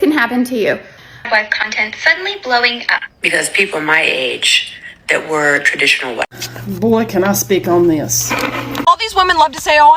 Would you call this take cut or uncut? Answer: cut